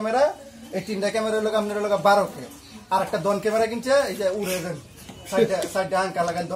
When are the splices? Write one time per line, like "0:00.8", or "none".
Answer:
none